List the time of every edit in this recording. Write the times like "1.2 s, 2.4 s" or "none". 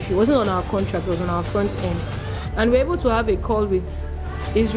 none